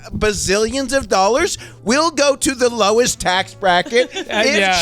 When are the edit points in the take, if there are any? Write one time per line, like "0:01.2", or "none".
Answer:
0:03.1

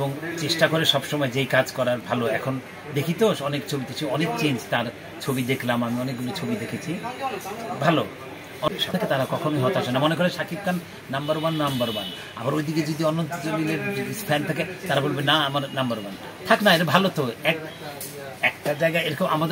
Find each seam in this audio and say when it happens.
0:08.7

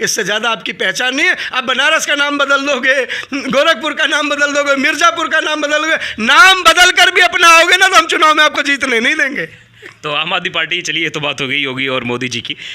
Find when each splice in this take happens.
none

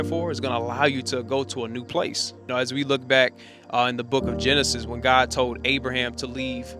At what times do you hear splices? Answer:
0:02.4

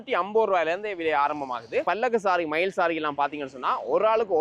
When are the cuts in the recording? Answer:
0:01.8

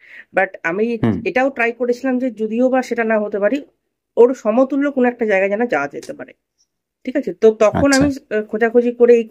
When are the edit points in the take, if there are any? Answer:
none

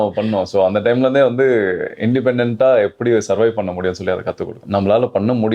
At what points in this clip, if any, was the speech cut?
0:04.6

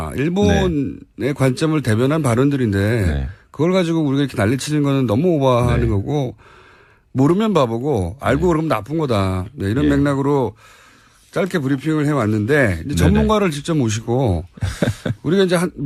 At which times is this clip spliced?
none

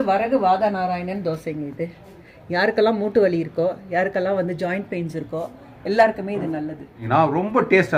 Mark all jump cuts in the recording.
0:02.3
0:07.0

